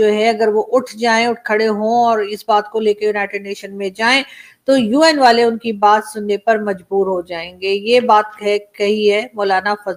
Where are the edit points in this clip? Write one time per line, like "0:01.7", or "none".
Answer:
none